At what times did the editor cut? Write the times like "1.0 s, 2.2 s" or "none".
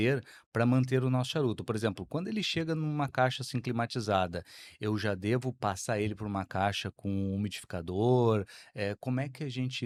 none

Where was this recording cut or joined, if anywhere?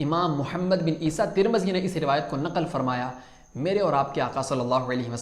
none

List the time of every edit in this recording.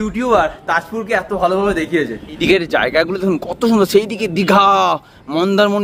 2.4 s

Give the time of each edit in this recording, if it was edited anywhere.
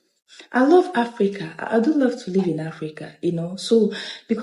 none

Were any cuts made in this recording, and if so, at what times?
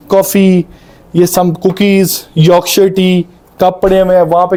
none

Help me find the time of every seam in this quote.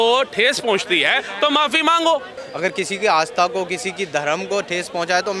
2.4 s

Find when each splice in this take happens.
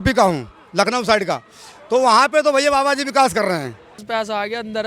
4.0 s

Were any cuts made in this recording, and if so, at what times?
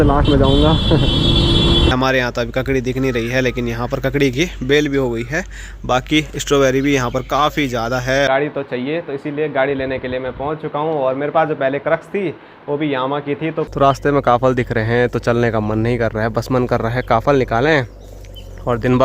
1.9 s, 4.1 s, 8.3 s, 13.7 s

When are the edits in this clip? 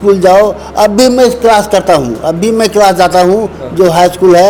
none

